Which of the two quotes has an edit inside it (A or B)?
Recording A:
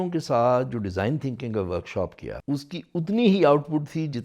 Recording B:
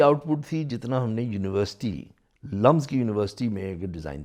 A